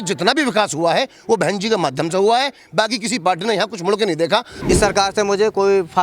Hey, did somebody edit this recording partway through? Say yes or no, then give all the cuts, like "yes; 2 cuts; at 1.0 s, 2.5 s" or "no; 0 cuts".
yes; 1 cut; at 4.5 s